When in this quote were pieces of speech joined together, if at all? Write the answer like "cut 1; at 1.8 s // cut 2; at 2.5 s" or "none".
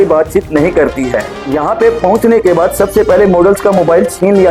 cut 1; at 1.4 s